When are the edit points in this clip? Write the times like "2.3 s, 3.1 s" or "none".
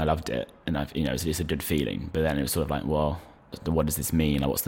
3.6 s